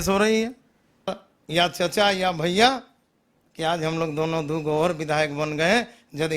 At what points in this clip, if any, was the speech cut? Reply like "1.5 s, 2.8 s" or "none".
1.1 s